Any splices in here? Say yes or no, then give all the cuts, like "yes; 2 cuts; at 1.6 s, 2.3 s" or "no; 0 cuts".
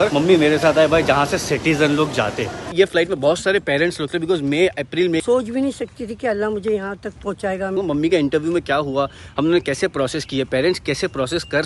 yes; 3 cuts; at 2.6 s, 5.2 s, 7.7 s